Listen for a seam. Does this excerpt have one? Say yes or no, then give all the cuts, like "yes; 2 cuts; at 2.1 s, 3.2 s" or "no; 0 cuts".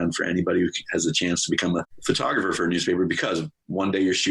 yes; 1 cut; at 1.9 s